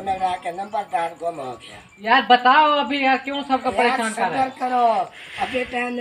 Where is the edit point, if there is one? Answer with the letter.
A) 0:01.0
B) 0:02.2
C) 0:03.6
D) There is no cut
B